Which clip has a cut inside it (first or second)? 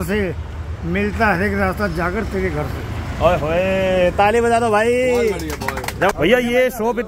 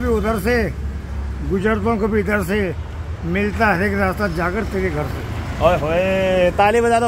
first